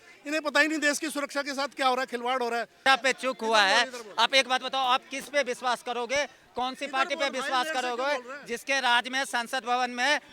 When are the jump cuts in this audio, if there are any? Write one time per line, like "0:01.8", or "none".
0:02.8